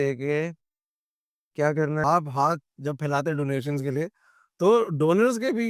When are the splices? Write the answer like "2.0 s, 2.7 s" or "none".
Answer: 2.0 s

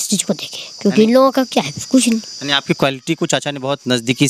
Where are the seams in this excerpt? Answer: none

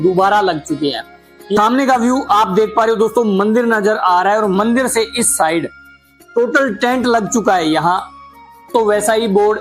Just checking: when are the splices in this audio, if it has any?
1.6 s, 8.7 s

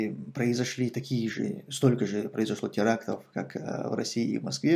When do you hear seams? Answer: none

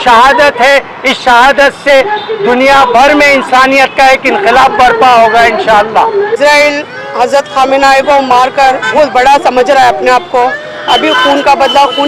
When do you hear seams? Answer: none

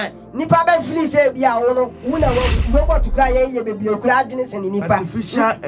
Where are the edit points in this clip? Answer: 2.6 s

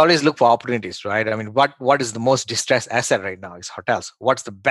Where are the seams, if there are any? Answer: none

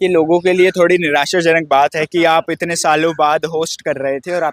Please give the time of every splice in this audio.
none

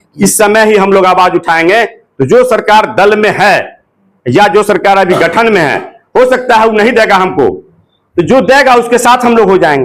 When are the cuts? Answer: none

